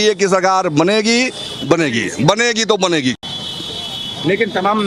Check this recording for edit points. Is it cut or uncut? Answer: uncut